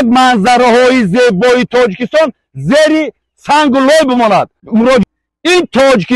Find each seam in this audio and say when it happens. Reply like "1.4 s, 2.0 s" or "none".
5.0 s